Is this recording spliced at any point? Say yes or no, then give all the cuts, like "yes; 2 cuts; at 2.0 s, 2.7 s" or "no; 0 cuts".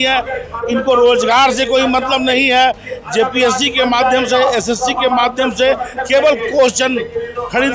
no; 0 cuts